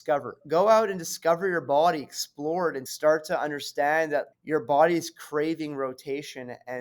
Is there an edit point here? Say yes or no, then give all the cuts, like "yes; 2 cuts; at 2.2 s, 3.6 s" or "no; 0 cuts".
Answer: yes; 2 cuts; at 2.9 s, 4.3 s